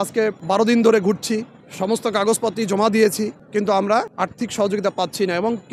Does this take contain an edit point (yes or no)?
no